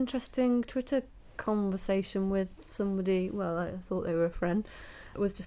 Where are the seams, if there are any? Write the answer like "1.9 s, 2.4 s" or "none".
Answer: none